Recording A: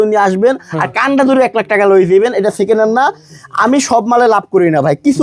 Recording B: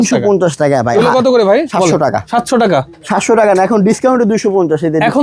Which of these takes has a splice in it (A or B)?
B